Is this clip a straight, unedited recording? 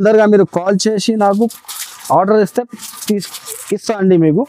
yes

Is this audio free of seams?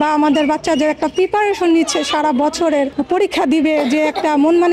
no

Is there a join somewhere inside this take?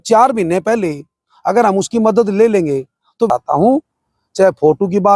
yes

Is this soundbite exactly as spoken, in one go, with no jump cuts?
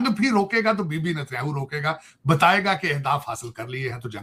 yes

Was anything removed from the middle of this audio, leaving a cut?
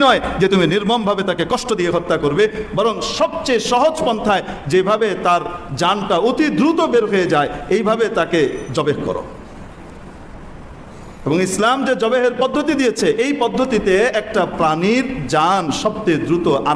no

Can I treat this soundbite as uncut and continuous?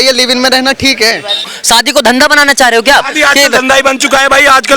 no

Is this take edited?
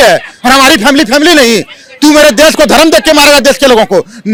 no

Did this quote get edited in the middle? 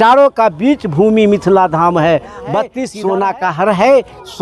yes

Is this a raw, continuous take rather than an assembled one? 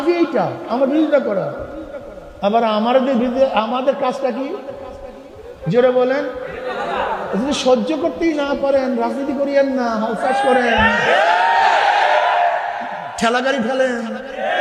yes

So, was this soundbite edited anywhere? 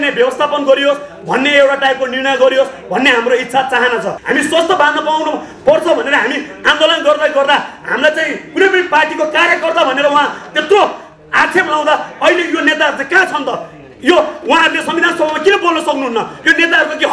yes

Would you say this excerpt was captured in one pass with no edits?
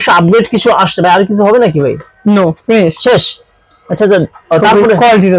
yes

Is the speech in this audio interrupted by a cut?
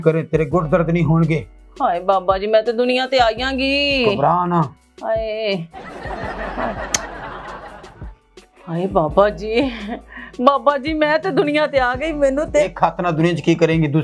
no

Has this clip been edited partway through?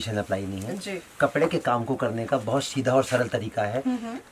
no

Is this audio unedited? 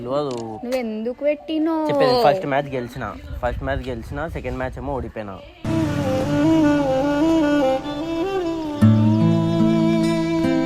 yes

